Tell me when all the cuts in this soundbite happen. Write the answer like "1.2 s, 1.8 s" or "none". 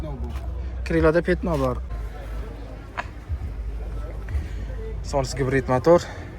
1.8 s